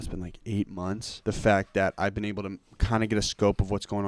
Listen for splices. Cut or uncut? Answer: cut